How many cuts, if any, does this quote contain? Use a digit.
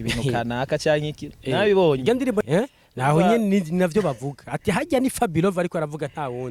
1